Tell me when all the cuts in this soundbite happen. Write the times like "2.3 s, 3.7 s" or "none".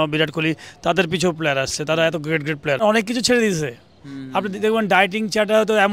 2.8 s